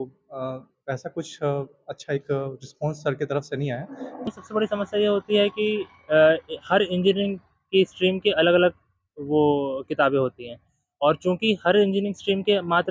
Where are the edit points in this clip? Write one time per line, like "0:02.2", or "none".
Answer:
0:04.3